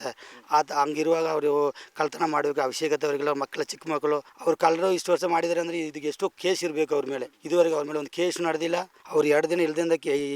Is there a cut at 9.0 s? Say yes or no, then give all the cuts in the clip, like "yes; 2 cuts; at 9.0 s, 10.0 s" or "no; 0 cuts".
yes; 3 cuts; at 4.3 s, 7.3 s, 9.0 s